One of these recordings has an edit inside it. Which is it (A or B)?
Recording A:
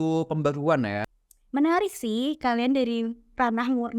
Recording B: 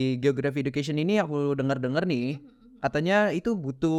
A